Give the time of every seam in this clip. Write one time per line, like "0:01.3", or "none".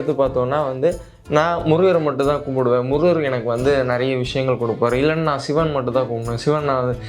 none